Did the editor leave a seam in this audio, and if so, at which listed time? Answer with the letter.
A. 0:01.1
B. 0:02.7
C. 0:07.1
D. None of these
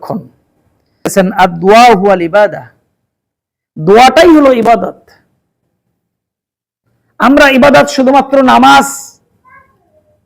A